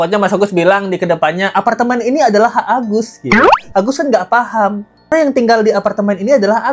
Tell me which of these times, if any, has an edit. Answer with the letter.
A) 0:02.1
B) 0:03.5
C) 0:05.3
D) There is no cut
D